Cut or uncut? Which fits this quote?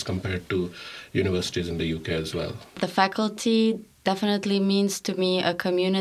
cut